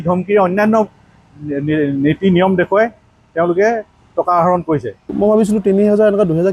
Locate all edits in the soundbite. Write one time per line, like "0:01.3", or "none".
0:05.1